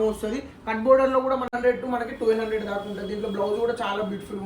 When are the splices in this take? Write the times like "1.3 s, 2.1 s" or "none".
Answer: 1.5 s

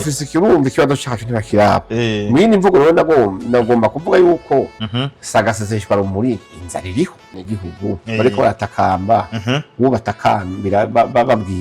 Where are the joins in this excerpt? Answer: 7.4 s

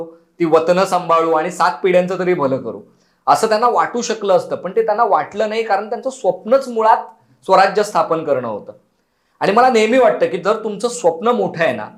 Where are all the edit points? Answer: none

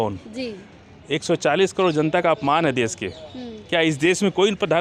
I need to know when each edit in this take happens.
none

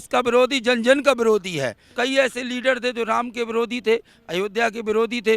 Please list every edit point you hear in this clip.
1.8 s

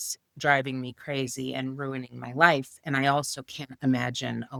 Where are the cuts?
none

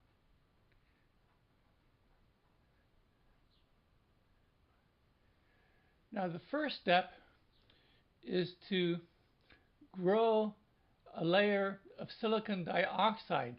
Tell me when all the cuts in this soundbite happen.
4.5 s

